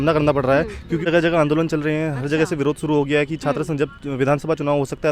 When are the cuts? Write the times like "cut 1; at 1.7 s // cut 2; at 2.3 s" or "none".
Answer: cut 1; at 1.0 s